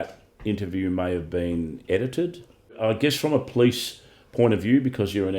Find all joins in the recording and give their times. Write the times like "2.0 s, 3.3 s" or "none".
2.8 s